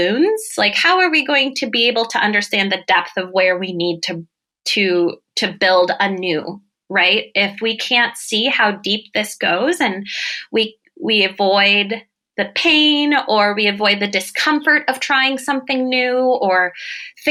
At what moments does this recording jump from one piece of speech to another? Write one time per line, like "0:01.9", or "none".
none